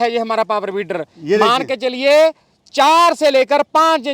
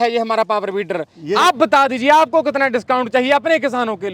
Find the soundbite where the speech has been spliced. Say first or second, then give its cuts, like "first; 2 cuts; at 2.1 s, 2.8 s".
second; 1 cut; at 1.2 s